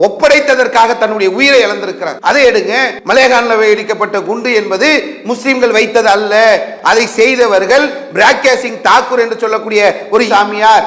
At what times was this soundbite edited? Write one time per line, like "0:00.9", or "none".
0:02.1
0:03.0
0:06.7